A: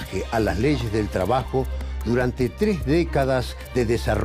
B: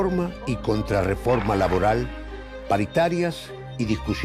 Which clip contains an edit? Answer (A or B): A